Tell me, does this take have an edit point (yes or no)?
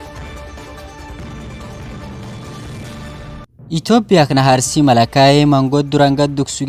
yes